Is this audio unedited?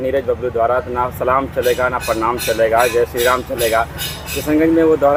yes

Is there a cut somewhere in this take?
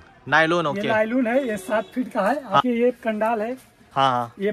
yes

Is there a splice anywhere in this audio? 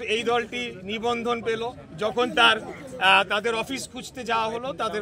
no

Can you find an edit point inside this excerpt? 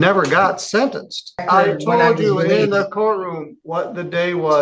yes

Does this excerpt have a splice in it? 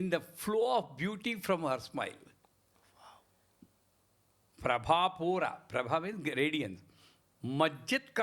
no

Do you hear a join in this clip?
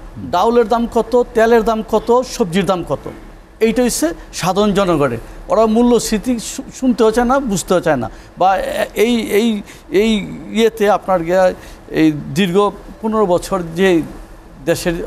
no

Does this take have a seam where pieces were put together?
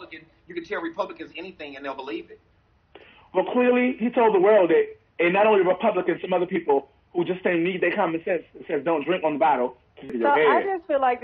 yes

